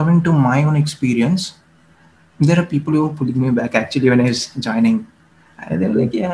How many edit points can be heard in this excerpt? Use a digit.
0